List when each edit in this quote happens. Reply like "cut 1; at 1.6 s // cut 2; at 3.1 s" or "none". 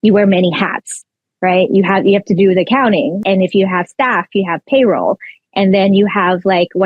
cut 1; at 3.2 s